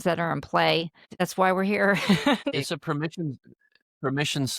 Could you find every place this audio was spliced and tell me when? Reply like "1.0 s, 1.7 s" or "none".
1.1 s, 2.4 s